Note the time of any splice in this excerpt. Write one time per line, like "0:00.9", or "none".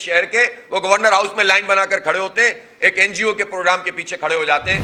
none